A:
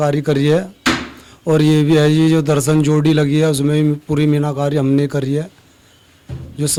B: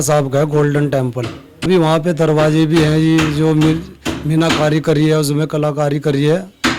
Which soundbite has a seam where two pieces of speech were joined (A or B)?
B